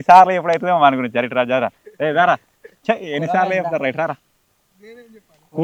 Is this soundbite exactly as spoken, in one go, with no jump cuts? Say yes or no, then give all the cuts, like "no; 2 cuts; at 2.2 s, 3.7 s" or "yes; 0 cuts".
yes; 0 cuts